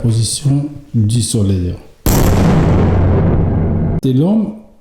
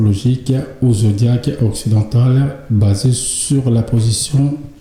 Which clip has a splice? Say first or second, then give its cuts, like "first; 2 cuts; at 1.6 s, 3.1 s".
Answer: first; 2 cuts; at 2.0 s, 4.0 s